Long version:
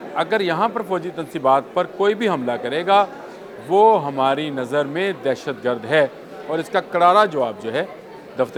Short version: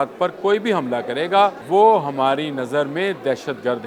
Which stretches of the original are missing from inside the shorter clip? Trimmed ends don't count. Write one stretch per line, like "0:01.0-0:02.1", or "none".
0:03.2-0:03.6